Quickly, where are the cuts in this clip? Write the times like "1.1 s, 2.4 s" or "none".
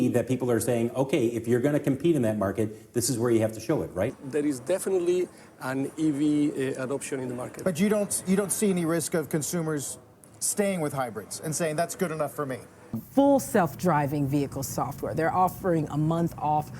4.1 s, 12.9 s